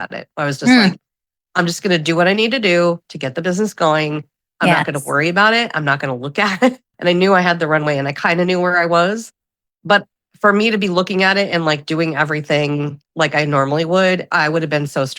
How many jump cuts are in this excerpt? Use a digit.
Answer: 2